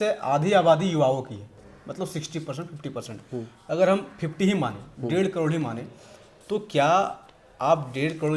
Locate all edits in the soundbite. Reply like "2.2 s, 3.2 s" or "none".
none

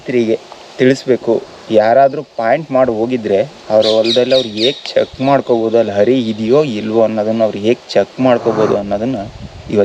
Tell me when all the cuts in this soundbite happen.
none

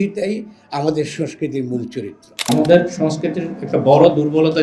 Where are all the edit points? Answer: 2.4 s

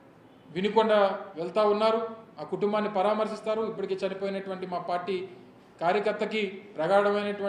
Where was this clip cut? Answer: none

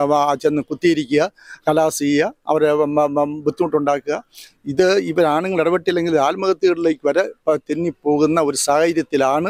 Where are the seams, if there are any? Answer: none

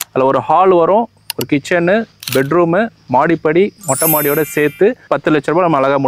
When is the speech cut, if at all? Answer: 5.1 s

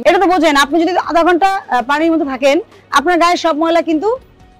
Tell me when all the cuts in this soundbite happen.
none

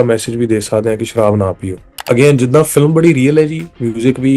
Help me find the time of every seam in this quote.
1.9 s

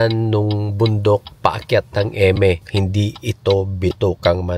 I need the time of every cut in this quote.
2.7 s

